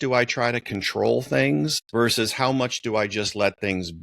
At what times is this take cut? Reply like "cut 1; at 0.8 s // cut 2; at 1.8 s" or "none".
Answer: cut 1; at 1.8 s